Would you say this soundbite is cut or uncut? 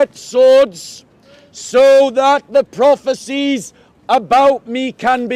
uncut